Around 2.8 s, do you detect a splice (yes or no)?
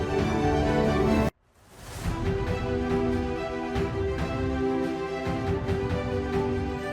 no